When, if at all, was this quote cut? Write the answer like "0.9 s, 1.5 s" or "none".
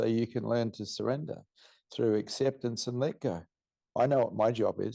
3.9 s